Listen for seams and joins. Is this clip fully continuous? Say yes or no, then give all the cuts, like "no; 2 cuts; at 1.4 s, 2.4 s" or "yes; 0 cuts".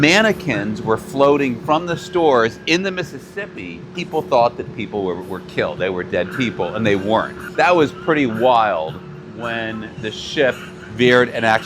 no; 2 cuts; at 3.9 s, 7.4 s